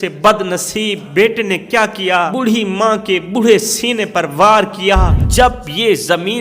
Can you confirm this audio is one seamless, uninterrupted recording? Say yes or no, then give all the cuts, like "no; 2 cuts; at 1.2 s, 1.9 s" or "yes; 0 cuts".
no; 3 cuts; at 1.0 s, 2.3 s, 5.2 s